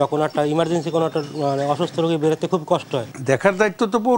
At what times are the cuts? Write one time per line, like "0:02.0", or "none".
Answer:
0:03.1